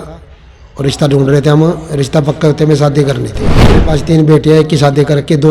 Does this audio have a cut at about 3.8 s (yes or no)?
yes